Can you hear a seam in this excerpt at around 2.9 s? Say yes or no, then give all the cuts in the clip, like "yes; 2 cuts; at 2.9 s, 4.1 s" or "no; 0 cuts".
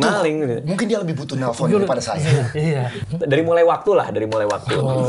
yes; 1 cut; at 2.9 s